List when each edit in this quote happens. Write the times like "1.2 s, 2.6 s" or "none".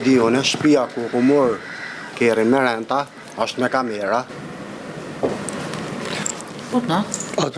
4.3 s